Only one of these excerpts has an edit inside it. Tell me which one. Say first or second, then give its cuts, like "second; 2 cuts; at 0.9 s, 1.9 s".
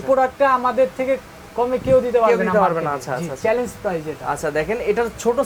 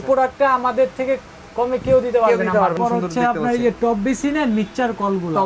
second; 1 cut; at 2.7 s